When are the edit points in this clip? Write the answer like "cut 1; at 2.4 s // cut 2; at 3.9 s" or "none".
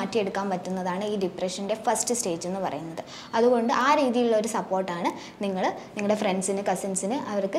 none

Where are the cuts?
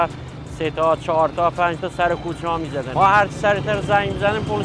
none

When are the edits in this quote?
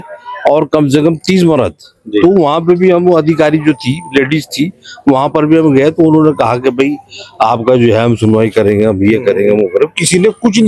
none

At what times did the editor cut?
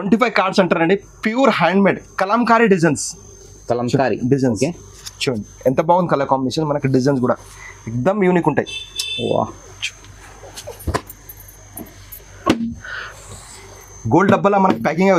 none

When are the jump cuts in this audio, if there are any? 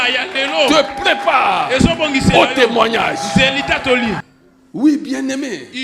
cut 1; at 4.2 s

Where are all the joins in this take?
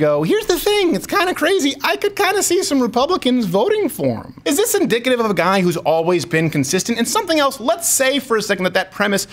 cut 1; at 4.3 s

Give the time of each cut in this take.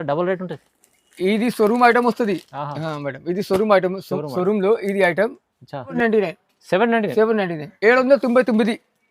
cut 1; at 5.9 s

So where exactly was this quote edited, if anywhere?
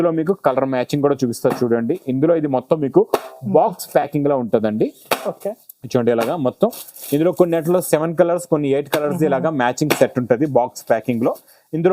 none

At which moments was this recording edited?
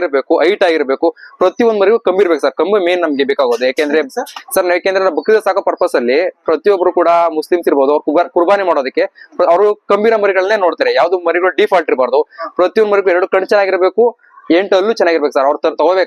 none

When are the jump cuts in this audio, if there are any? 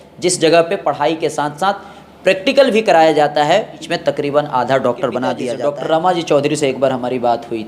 cut 1; at 3.8 s // cut 2; at 5.5 s

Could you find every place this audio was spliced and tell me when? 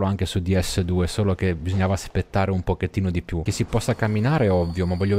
cut 1; at 3.5 s

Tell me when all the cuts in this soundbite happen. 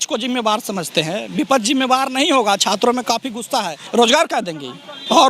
cut 1; at 3.8 s

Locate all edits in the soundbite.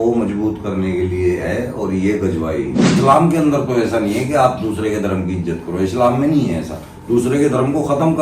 cut 1; at 3.0 s

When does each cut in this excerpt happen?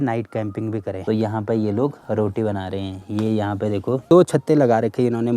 cut 1; at 0.9 s // cut 2; at 4.0 s

